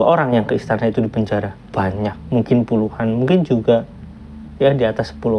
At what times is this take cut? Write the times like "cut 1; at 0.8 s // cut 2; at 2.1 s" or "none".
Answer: none